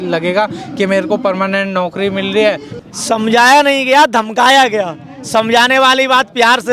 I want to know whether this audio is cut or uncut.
cut